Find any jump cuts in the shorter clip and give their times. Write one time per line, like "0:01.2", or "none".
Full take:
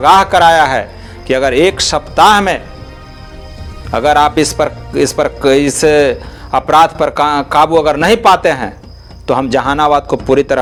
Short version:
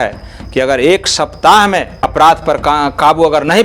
0:02.1